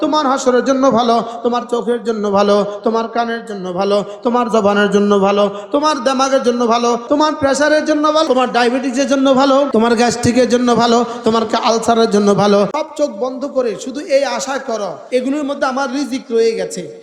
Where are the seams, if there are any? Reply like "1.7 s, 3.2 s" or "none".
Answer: 7.0 s, 8.3 s, 9.7 s, 12.7 s, 15.0 s